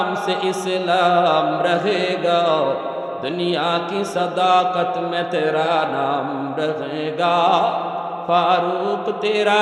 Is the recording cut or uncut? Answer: uncut